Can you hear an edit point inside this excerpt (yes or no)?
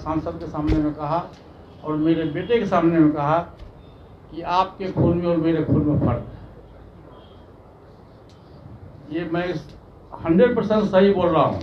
no